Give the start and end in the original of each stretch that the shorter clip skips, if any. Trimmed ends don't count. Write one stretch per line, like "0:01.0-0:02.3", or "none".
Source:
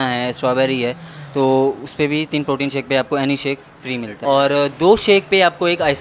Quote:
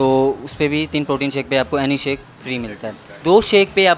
0:04.3-0:04.4